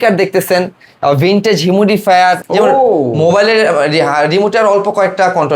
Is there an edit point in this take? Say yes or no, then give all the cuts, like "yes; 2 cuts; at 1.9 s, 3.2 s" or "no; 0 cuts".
yes; 1 cut; at 2.4 s